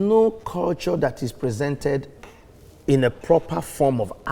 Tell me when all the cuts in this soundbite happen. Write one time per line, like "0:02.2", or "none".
none

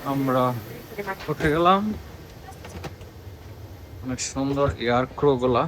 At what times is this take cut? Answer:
none

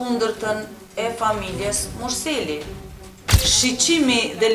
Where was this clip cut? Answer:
0:03.3

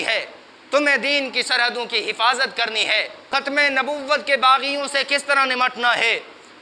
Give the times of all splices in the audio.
0:03.2

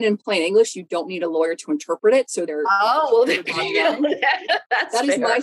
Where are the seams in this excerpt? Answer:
0:02.5

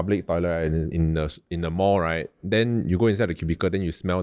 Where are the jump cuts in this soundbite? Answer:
none

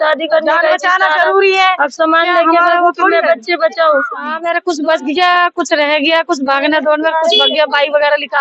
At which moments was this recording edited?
0:04.3

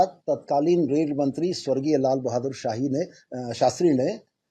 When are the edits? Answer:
none

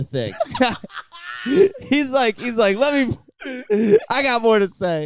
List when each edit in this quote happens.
none

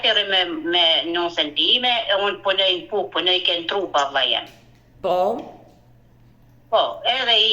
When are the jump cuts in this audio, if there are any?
none

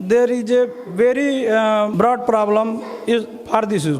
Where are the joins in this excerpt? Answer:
0:01.9

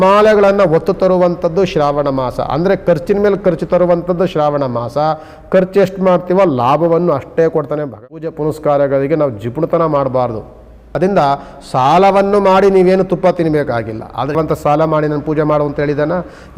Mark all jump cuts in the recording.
0:08.0
0:11.0
0:14.3

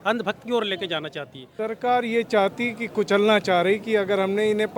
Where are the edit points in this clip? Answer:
0:01.4

